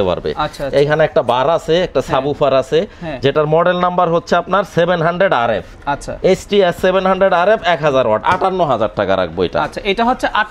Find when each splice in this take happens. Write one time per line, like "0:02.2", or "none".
none